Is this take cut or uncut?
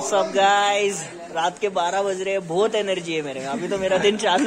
uncut